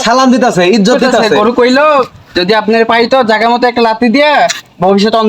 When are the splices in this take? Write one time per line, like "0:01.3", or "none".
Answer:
0:01.3